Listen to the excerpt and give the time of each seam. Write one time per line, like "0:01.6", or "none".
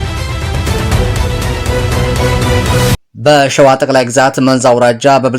0:03.0